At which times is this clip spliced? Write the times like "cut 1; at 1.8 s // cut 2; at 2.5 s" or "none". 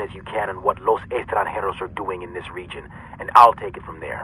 none